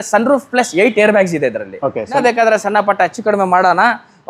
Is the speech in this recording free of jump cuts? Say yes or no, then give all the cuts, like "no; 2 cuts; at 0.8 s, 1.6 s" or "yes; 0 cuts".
no; 1 cut; at 2.2 s